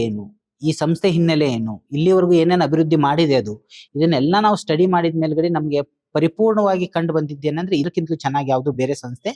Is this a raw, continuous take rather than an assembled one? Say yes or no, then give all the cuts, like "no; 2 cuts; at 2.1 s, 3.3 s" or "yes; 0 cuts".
no; 1 cut; at 7.9 s